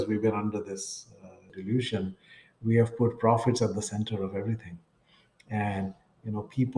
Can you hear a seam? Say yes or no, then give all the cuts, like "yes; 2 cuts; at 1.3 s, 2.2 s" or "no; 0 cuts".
yes; 1 cut; at 1.5 s